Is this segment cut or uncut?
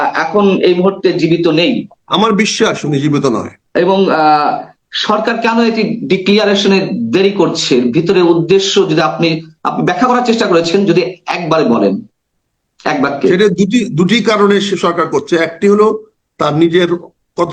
cut